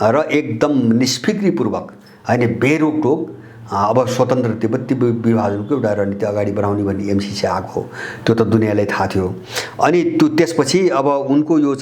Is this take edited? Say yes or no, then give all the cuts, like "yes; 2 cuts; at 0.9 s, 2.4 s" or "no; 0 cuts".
no; 0 cuts